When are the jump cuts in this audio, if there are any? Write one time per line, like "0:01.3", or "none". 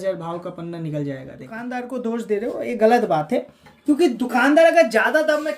0:01.6